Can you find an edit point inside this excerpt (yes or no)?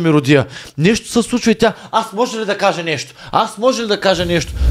no